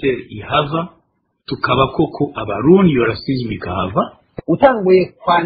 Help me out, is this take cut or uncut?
cut